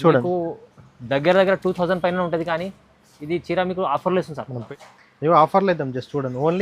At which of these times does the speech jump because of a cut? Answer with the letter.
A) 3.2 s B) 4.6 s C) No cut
B